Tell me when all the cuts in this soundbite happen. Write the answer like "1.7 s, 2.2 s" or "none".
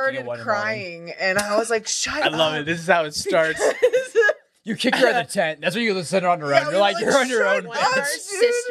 none

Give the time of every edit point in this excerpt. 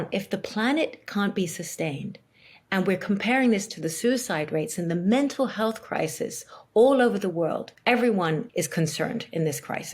8.5 s

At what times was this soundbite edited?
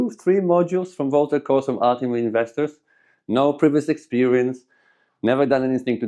none

